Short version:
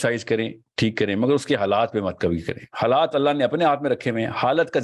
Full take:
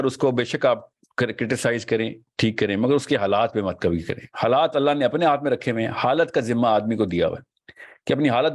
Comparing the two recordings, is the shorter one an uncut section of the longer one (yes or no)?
yes